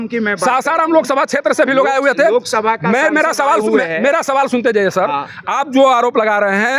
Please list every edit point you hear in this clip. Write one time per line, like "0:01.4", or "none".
none